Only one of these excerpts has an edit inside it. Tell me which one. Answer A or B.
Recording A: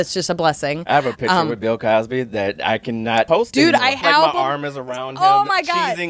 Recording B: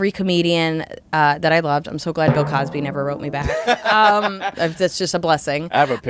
A